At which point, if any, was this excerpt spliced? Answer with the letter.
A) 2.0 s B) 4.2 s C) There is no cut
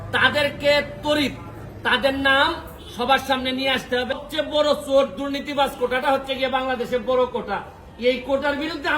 B